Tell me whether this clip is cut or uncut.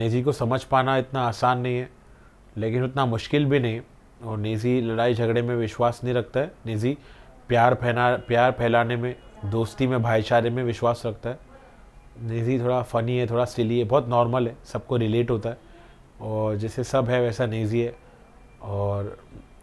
uncut